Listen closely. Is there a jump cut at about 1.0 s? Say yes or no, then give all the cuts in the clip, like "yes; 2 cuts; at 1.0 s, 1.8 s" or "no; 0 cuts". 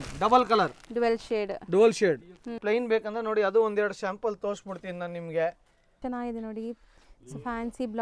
no; 2 cuts; at 2.6 s, 5.9 s